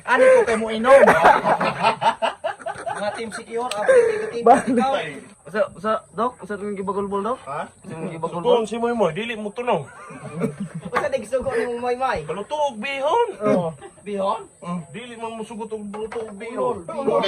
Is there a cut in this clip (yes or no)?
no